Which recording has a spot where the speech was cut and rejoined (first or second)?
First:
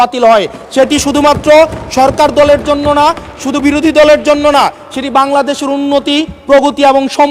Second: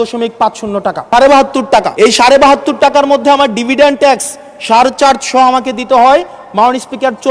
second